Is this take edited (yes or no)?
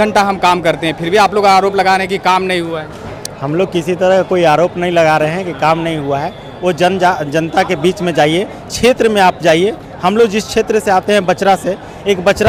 no